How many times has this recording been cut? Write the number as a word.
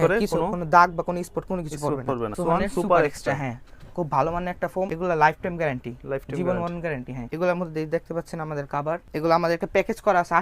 four